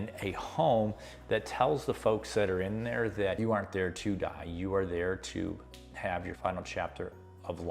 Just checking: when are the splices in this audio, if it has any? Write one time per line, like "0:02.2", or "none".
0:03.4
0:06.3